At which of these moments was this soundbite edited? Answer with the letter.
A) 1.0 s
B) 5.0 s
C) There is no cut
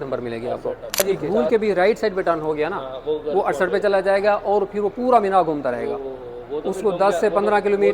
A